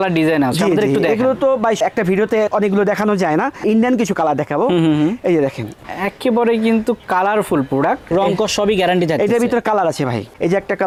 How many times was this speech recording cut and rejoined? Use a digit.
0